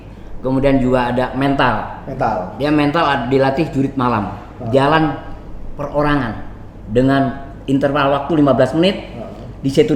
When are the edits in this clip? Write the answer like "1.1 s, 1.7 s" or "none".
none